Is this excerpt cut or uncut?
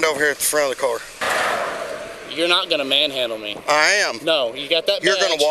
cut